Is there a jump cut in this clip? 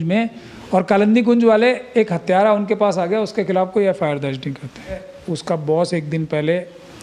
yes; 1 cut; at 5.1 s

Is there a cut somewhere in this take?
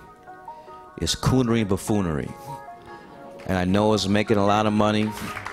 no; 0 cuts

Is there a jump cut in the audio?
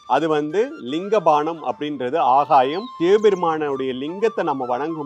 yes; 1 cut; at 2.9 s

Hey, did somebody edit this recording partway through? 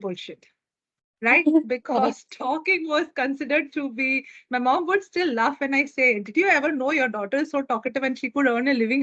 no; 0 cuts

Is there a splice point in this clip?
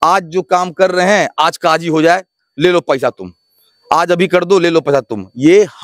no; 0 cuts

